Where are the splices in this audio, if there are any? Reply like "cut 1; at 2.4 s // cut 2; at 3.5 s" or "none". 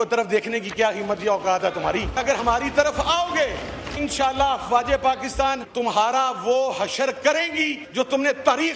cut 1; at 2.6 s // cut 2; at 4.0 s // cut 3; at 5.7 s // cut 4; at 7.8 s